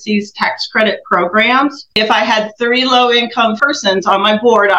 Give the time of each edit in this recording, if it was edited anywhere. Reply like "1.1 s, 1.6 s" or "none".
1.8 s, 3.6 s